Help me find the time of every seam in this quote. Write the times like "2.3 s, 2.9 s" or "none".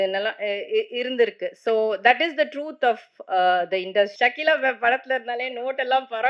4.1 s